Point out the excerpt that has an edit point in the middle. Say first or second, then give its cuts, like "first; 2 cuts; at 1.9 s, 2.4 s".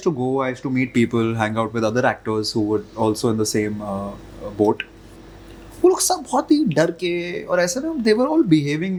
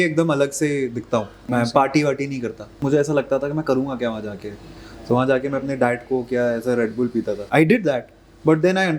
second; 3 cuts; at 1.4 s, 2.8 s, 7.4 s